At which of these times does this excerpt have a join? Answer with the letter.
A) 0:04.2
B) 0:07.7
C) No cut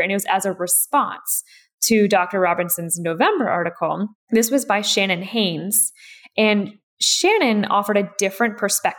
A